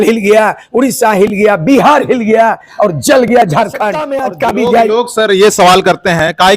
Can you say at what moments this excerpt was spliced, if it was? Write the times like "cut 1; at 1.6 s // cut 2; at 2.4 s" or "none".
cut 1; at 4.2 s